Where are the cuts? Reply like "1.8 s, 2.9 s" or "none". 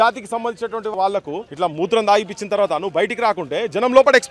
0.9 s